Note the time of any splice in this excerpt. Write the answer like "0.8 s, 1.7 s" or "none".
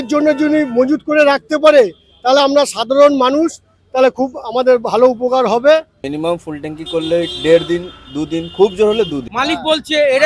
6.0 s, 9.2 s